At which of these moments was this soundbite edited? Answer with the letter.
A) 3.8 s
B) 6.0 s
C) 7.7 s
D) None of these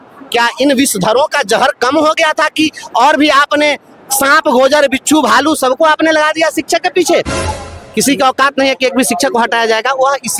C